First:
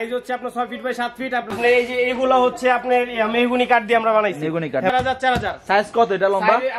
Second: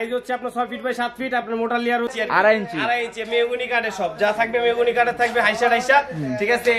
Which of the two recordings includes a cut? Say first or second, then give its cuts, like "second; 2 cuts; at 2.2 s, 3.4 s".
first; 2 cuts; at 1.5 s, 4.9 s